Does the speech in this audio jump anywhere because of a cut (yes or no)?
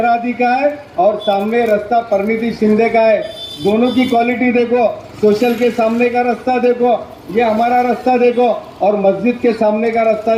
no